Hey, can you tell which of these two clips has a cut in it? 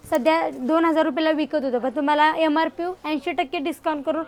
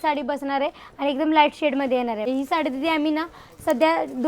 second; 1 cut; at 2.3 s

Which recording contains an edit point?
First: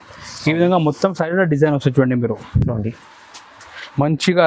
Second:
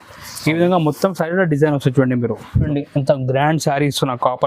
second; 1 cut; at 2.7 s

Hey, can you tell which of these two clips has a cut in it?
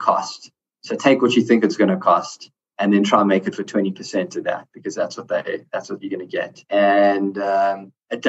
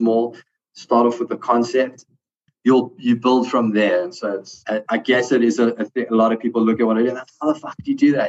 second; 2 cuts; at 2.0 s, 4.5 s

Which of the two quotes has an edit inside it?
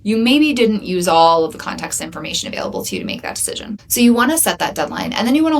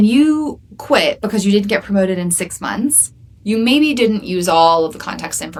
first; 1 cut; at 3.8 s

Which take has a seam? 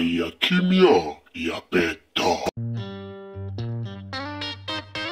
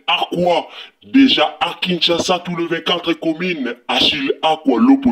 first; 1 cut; at 2.6 s

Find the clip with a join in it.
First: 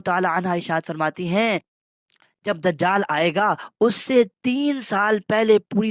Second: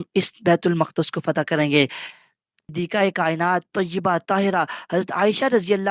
second; 1 cut; at 2.5 s

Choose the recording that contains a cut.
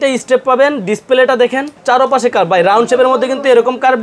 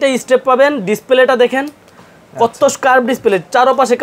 first; 1 cut; at 1.8 s

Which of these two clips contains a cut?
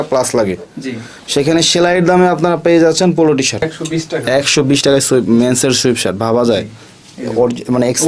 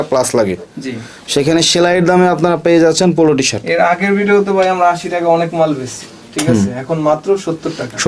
first; 1 cut; at 3.6 s

